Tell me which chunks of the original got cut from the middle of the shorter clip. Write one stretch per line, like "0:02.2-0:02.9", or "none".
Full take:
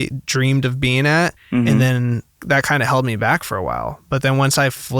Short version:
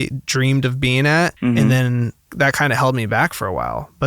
0:01.3-0:01.4

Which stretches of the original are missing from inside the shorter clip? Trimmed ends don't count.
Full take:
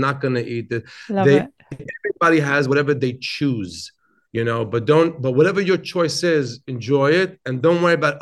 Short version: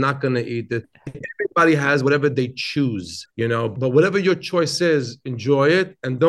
0:01.0-0:01.6
0:04.4-0:05.1

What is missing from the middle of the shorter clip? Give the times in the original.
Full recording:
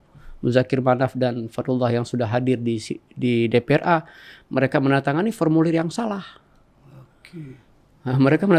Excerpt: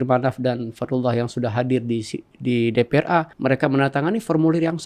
0:04.1-0:04.4

